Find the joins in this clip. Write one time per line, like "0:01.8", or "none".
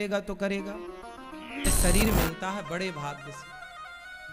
0:01.7